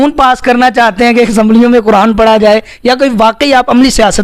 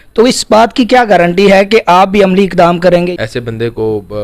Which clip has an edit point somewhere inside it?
second; 1 cut; at 3.2 s

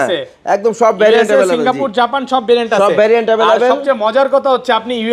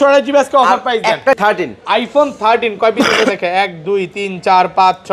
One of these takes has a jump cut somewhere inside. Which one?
second; 1 cut; at 1.4 s

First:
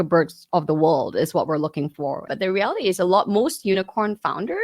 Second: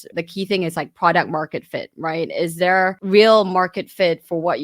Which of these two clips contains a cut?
first; 1 cut; at 2.2 s

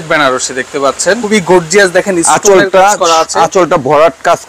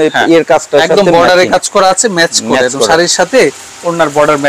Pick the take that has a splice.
first; 1 cut; at 1.2 s

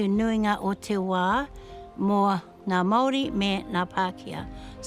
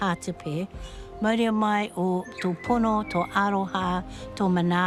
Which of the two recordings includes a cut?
first; 1 cut; at 2.5 s

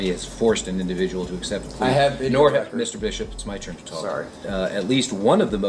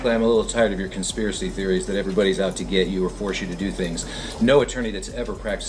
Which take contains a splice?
first; 1 cut; at 4.5 s

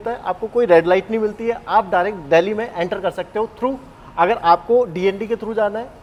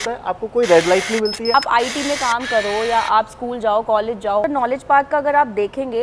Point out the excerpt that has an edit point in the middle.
second; 2 cuts; at 1.5 s, 4.5 s

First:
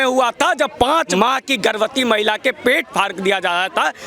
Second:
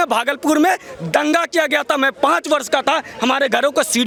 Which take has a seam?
first; 1 cut; at 1.1 s

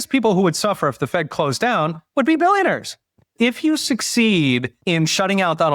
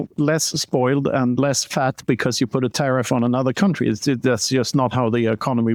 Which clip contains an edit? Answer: first; 2 cuts; at 3.2 s, 4.7 s

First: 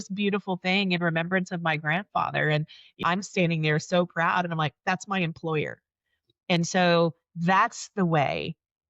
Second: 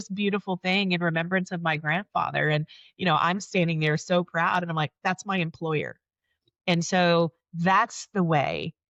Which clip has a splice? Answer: first; 1 cut; at 3.0 s

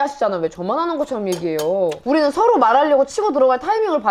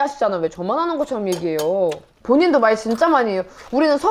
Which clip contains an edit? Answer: first; 1 cut; at 2.0 s

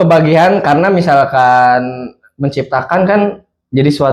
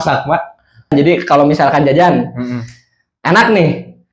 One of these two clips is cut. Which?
second; 1 cut; at 0.9 s

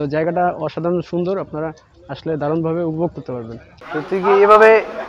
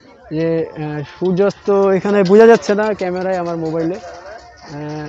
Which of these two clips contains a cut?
first; 1 cut; at 3.8 s

